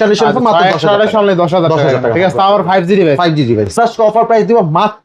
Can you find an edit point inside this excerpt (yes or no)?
yes